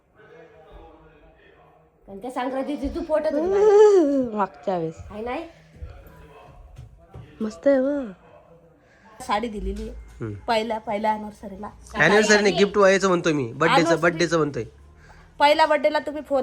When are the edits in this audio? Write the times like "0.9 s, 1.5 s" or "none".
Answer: 9.2 s